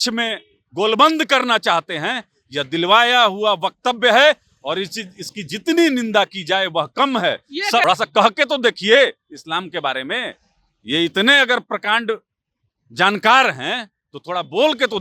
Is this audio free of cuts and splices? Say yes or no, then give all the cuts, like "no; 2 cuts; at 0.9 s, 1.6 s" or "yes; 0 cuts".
no; 1 cut; at 7.8 s